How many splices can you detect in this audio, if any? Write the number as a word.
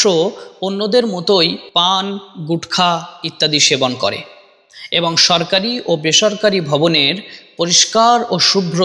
one